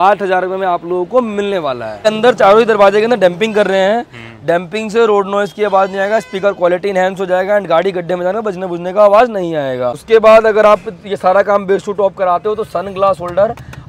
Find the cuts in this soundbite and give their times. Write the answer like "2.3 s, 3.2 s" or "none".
2.1 s, 10.0 s